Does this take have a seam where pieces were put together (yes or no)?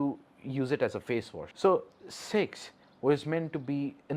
yes